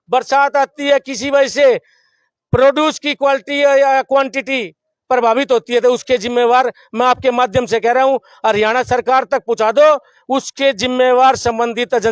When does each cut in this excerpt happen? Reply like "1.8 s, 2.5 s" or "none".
none